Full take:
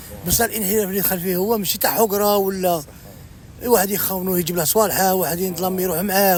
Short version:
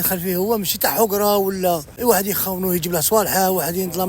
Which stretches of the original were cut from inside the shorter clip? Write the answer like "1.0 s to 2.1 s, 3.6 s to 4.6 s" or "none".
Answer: 2.9 s to 3.5 s